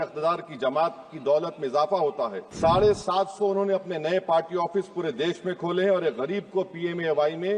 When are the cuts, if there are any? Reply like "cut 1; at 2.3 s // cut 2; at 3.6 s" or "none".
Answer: cut 1; at 2.4 s